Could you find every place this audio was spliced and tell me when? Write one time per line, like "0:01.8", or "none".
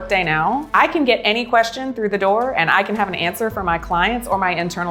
none